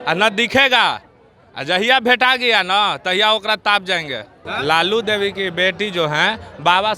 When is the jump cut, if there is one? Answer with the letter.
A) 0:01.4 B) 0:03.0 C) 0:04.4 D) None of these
C